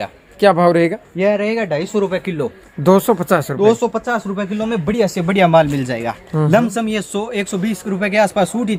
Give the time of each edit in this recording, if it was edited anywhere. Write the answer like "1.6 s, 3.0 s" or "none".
none